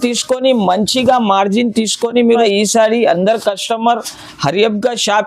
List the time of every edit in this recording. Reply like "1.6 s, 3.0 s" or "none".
2.4 s